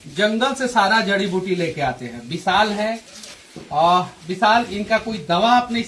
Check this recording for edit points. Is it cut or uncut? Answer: uncut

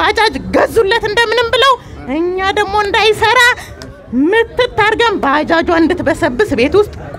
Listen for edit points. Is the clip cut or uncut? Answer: uncut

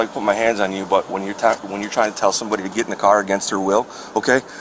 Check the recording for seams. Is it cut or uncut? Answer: uncut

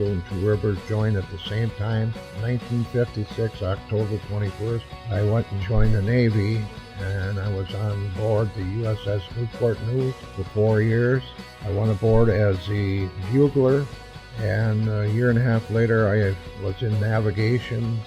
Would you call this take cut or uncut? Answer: cut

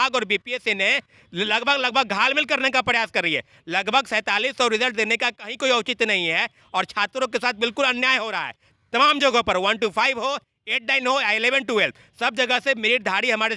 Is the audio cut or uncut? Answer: uncut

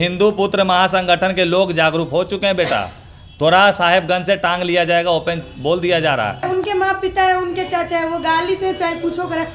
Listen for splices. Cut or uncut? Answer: cut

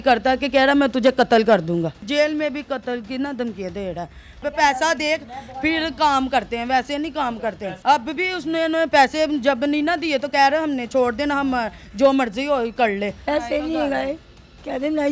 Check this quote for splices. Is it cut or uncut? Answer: cut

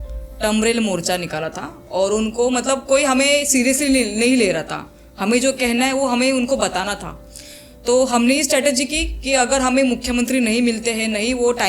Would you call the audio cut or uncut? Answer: uncut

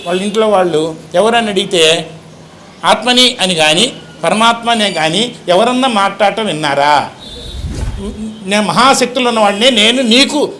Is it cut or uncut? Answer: cut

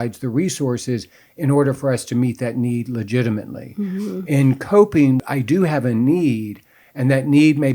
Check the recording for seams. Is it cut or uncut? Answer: cut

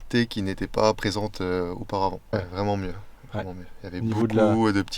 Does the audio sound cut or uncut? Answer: cut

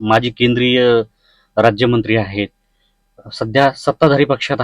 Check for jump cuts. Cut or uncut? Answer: uncut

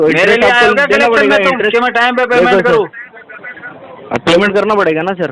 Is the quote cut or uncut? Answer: uncut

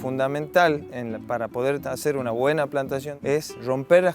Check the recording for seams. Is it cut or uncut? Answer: cut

